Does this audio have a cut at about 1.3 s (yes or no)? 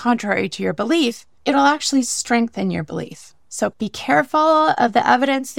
yes